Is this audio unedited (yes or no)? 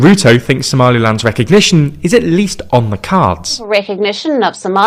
no